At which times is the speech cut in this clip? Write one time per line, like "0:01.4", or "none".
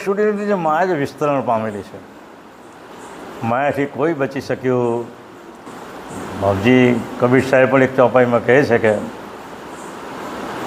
none